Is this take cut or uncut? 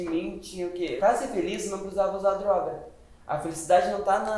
cut